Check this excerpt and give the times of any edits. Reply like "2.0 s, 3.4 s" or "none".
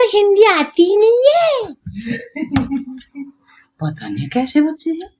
none